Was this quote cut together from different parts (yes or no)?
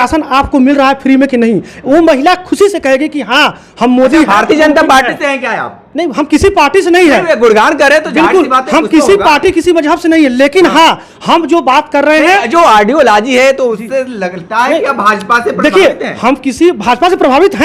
no